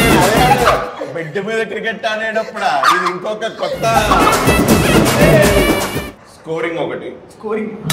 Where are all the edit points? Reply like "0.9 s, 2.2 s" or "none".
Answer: 5.9 s